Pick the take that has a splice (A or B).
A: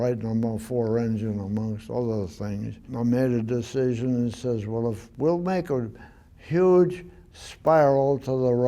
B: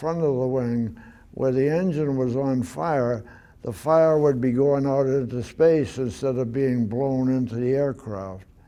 A